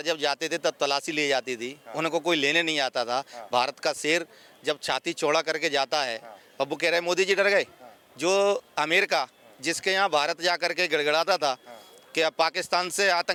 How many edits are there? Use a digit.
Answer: 0